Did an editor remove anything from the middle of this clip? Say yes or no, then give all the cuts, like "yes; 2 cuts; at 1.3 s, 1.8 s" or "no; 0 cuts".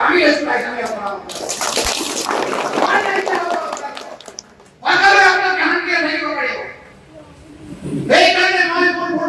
yes; 1 cut; at 1.2 s